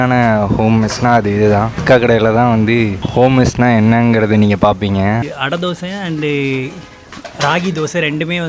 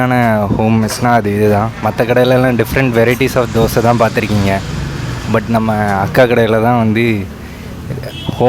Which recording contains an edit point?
first; 3 cuts; at 1.8 s, 3.0 s, 5.3 s

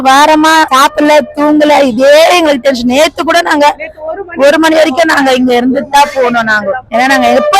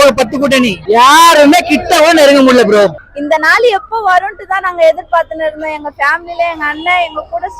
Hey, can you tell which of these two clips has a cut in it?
second; 1 cut; at 3.0 s

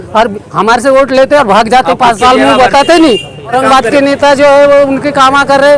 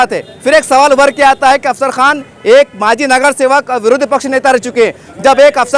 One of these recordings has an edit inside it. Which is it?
first; 1 cut; at 3.5 s

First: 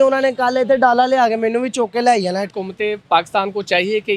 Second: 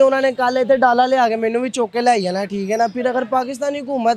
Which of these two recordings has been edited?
first; 1 cut; at 2.5 s

